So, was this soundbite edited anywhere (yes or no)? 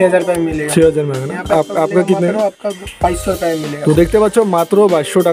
no